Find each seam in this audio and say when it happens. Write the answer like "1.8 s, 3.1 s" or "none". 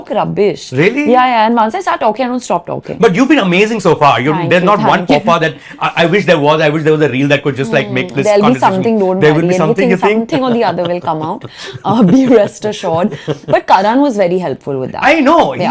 none